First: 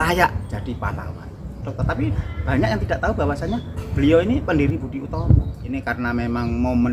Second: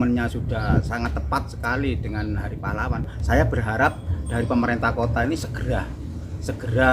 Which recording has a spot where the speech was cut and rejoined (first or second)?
first